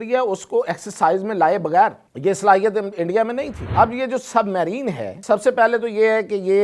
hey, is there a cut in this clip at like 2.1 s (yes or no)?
yes